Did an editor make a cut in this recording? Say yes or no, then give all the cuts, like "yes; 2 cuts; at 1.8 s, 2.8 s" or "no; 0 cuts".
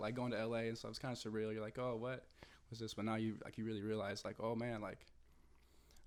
no; 0 cuts